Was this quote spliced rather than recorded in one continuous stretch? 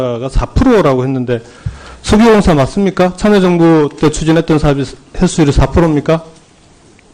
yes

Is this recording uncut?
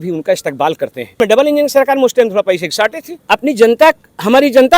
no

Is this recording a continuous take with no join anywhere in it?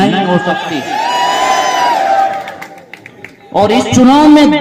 yes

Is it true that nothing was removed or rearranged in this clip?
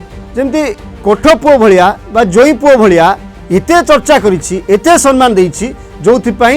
yes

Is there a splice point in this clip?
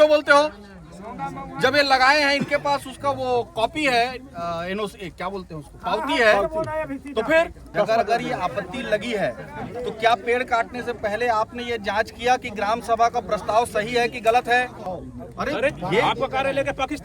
yes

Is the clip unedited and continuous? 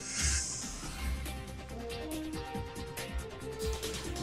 yes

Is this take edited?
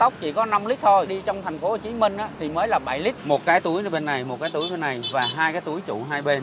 yes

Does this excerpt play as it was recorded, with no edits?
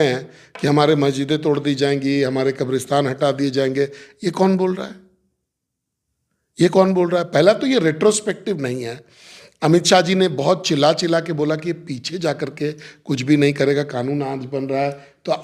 yes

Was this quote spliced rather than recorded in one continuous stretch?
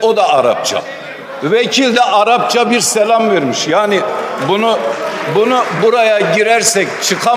no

